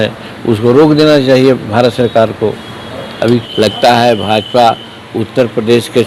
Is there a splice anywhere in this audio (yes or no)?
yes